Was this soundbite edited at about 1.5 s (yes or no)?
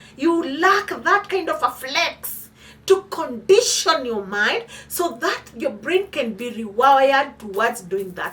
no